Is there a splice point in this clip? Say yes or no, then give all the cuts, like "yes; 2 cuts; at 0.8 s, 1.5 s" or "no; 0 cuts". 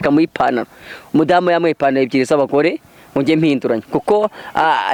no; 0 cuts